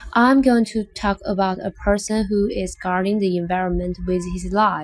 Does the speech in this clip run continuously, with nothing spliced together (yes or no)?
yes